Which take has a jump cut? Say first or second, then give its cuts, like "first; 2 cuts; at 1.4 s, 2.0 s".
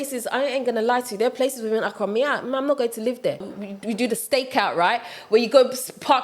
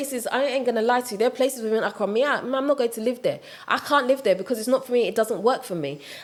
first; 1 cut; at 3.6 s